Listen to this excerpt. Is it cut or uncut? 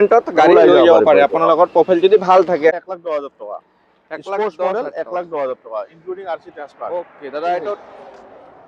cut